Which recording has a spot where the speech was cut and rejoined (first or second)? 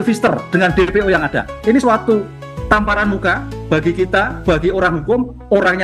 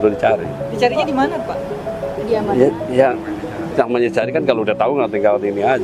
first